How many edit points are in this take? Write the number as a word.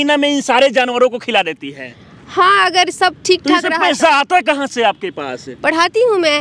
zero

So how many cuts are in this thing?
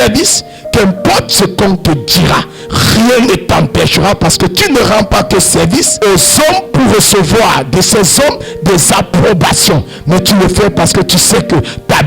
zero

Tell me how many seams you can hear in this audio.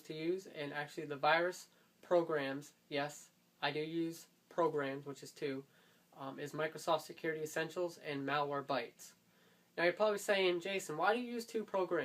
one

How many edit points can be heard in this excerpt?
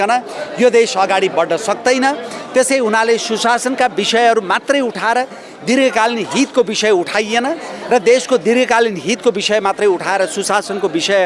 zero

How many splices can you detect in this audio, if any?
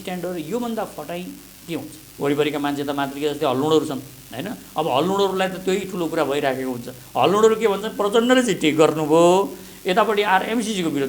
one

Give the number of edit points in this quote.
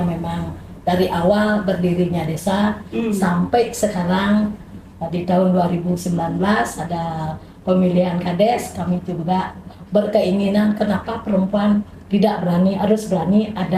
zero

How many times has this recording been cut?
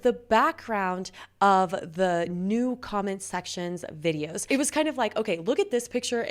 one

